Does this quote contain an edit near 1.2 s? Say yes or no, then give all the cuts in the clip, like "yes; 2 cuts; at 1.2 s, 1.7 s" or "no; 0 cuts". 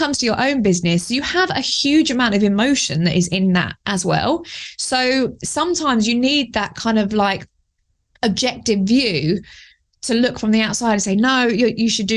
no; 0 cuts